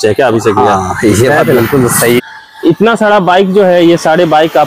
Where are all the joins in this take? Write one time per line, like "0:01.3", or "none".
0:02.2